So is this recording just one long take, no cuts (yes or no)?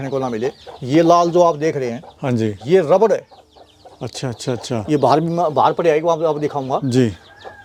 yes